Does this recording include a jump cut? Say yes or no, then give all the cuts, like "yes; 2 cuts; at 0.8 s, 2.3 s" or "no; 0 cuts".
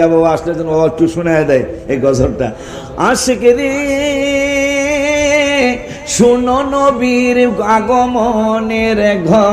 yes; 1 cut; at 2.7 s